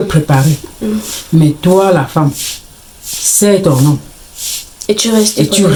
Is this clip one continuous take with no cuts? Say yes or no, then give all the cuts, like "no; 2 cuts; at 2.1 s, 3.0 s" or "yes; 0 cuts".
yes; 0 cuts